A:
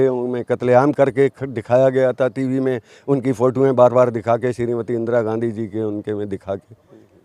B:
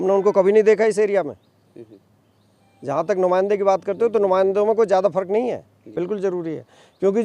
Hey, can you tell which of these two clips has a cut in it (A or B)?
B